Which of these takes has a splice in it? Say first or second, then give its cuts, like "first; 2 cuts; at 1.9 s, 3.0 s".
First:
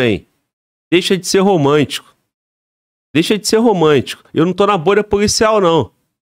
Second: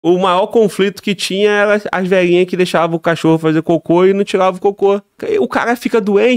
second; 1 cut; at 5.2 s